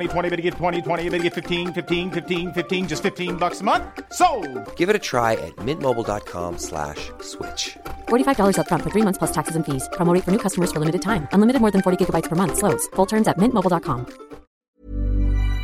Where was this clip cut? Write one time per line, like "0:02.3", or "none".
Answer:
0:14.5